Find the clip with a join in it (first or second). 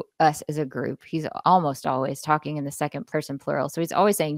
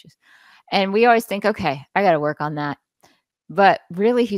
first